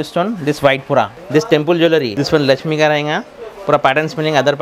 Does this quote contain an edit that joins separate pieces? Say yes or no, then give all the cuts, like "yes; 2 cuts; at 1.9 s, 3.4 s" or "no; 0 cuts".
yes; 2 cuts; at 1.2 s, 2.1 s